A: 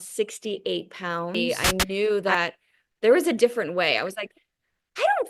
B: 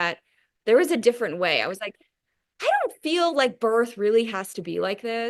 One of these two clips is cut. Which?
A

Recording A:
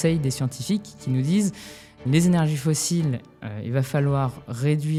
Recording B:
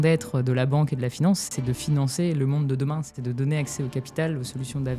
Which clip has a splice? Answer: B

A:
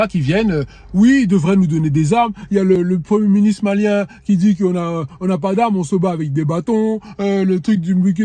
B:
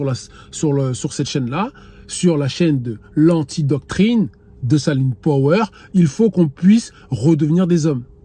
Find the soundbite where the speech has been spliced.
A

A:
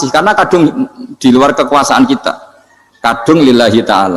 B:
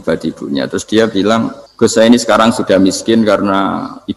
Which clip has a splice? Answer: B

